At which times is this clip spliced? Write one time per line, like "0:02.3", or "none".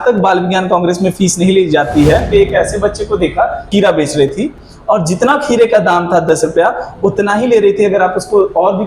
0:02.2
0:03.7